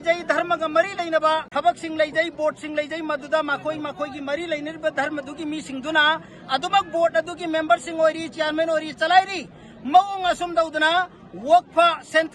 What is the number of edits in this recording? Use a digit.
1